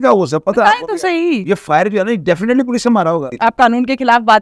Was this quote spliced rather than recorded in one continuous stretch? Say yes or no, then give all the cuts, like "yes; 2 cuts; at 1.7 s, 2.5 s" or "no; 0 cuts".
yes; 2 cuts; at 1.4 s, 3.3 s